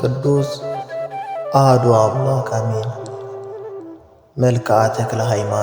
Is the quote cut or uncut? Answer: cut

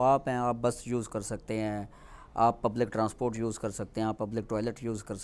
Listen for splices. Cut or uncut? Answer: uncut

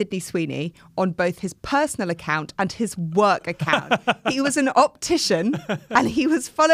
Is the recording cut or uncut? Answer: uncut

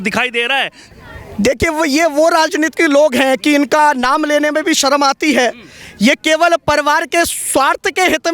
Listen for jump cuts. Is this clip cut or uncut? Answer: uncut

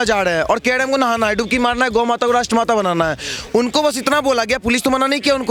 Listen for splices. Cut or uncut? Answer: uncut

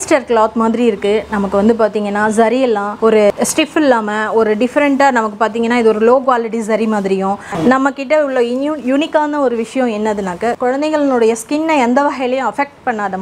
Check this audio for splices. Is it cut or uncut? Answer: cut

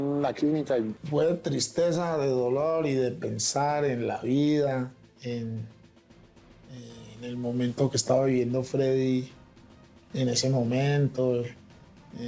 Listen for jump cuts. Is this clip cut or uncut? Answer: cut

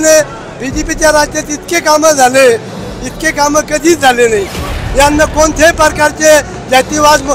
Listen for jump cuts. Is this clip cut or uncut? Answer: cut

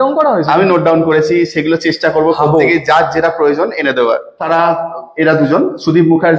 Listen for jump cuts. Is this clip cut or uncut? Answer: cut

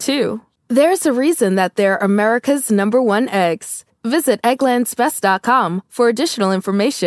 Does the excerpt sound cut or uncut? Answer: uncut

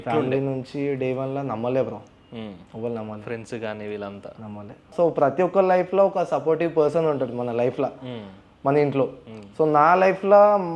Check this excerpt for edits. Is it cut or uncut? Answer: cut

